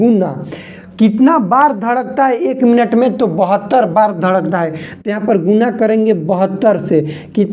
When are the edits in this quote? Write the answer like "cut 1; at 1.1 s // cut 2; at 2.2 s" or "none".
none

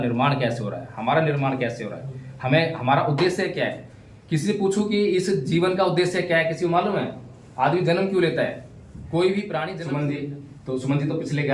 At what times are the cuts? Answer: cut 1; at 9.7 s

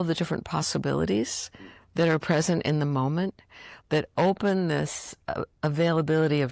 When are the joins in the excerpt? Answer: none

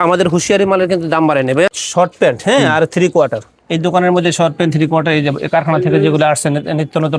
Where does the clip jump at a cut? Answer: cut 1; at 1.7 s

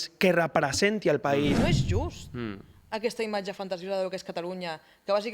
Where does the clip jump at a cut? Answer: cut 1; at 1.7 s

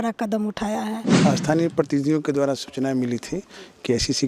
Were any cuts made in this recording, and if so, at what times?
cut 1; at 1.2 s

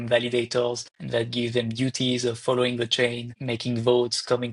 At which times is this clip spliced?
cut 1; at 0.9 s // cut 2; at 3.3 s

